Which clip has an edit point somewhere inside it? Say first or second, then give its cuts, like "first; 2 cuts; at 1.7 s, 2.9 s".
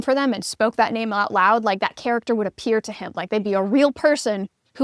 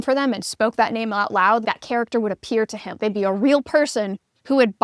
second; 2 cuts; at 1.6 s, 2.8 s